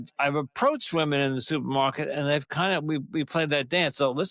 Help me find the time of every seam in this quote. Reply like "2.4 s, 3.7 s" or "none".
none